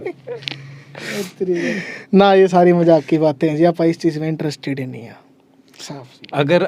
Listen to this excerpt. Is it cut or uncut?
cut